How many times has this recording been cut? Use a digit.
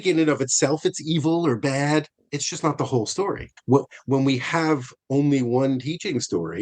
1